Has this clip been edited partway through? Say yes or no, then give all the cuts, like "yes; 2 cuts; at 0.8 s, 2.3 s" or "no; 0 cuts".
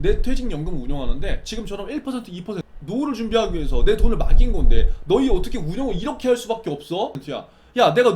yes; 2 cuts; at 2.7 s, 7.2 s